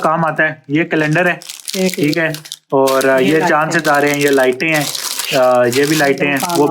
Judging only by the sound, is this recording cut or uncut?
uncut